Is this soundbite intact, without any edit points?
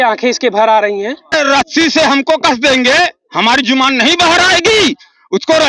no; 1 cut; at 1.3 s

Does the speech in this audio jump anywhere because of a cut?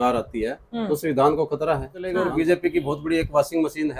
yes; 1 cut; at 2.2 s

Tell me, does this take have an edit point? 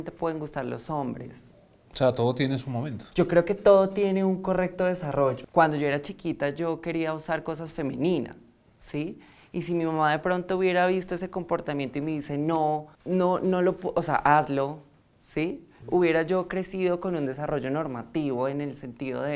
yes; 3 cuts; at 5.4 s, 12.9 s, 15.7 s

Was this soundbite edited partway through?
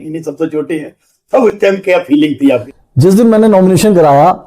yes; 1 cut; at 2.7 s

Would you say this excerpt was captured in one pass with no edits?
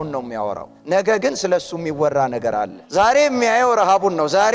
yes; 0 cuts

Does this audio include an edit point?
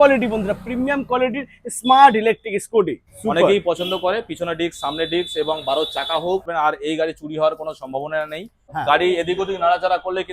yes; 3 cuts; at 3.1 s, 6.5 s, 8.6 s

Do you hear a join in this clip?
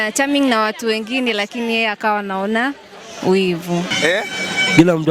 yes; 1 cut; at 3.9 s

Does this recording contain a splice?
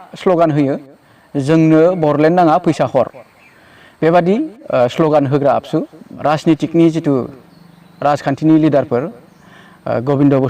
yes; 1 cut; at 6.0 s

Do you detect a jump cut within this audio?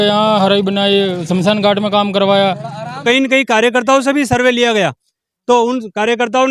yes; 1 cut; at 3.0 s

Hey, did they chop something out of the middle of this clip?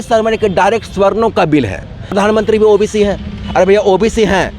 yes; 1 cut; at 2.1 s

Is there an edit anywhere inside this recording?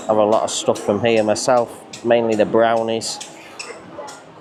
no; 0 cuts

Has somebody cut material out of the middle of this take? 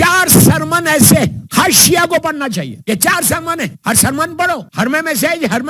yes; 4 cuts; at 1.4 s, 2.7 s, 3.8 s, 4.7 s

